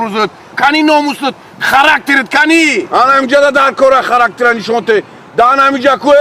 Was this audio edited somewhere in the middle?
no; 0 cuts

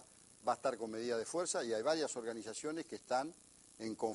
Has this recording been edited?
no; 0 cuts

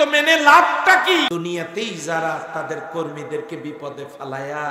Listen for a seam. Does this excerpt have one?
yes; 1 cut; at 1.3 s

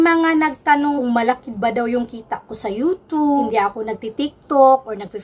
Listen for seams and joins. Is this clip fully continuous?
no; 2 cuts; at 1.0 s, 3.4 s

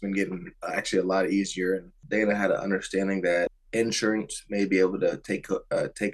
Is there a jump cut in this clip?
yes; 2 cuts; at 1.9 s, 3.6 s

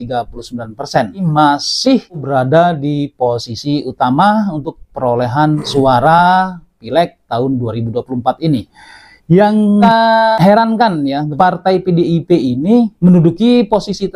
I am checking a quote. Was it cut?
yes; 2 cuts; at 1.2 s, 2.2 s

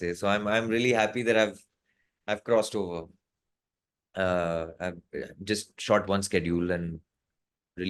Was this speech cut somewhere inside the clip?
no; 0 cuts

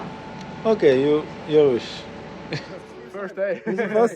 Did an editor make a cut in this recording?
yes; 1 cut; at 3.0 s

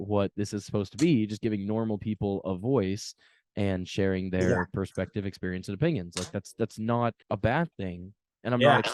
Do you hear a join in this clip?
no; 0 cuts

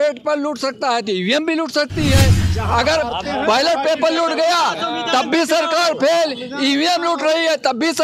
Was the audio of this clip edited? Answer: yes; 1 cut; at 2.5 s

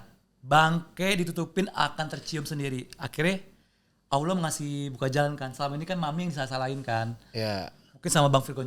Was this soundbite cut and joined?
no; 0 cuts

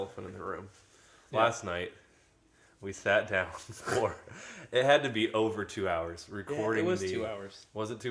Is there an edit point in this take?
yes; 1 cut; at 1.2 s

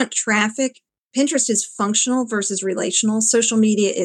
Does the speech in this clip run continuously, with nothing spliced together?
yes; 0 cuts

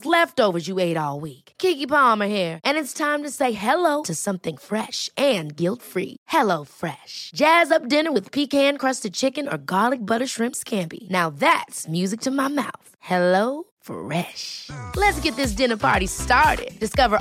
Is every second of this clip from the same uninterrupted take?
yes; 0 cuts

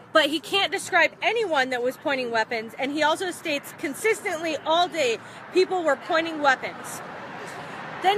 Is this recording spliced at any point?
no; 0 cuts

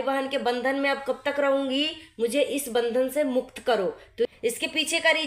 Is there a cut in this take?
yes; 1 cut; at 4.3 s

